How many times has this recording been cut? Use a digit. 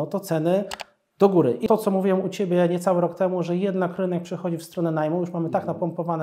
1